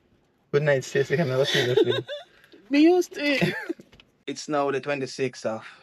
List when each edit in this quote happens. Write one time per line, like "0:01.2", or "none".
0:04.3